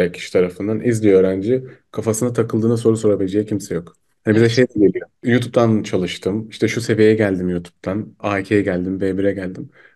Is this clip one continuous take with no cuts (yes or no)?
yes